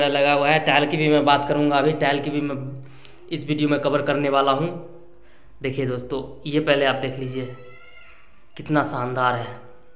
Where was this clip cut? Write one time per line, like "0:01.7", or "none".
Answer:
none